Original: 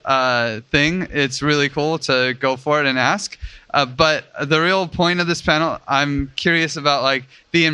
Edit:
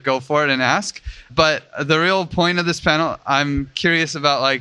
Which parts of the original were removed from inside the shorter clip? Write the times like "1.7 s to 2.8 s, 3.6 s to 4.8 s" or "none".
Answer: 3.6 s to 3.9 s